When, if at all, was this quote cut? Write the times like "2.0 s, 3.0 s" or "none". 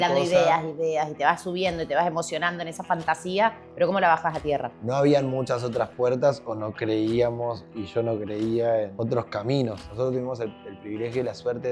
4.8 s, 8.9 s, 9.9 s